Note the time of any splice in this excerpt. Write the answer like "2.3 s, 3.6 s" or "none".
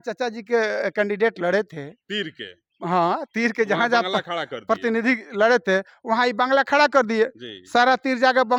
none